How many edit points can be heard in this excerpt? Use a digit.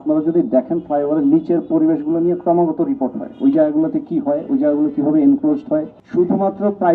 1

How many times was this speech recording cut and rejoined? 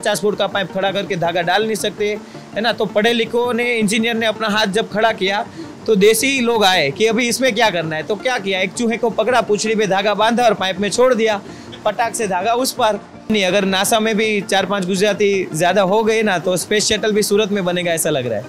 1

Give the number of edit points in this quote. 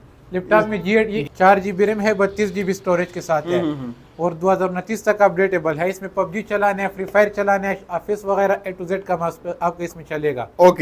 1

